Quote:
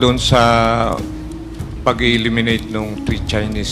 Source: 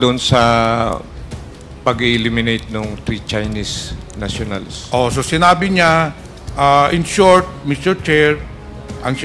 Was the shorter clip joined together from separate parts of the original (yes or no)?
no